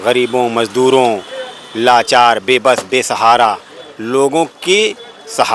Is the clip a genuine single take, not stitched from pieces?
yes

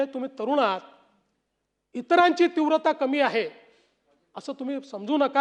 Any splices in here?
no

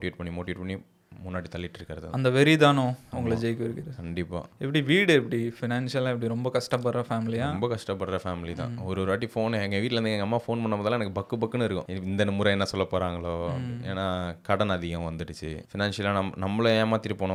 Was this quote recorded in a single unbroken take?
yes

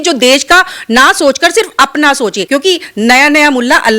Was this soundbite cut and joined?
yes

